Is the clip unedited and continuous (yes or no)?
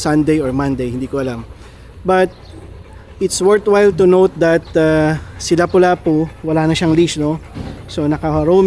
yes